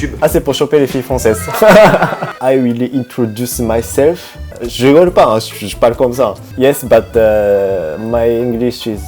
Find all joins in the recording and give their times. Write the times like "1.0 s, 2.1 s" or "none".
2.3 s